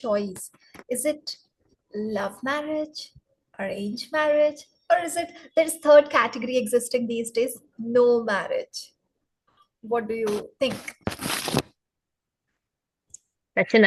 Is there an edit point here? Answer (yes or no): no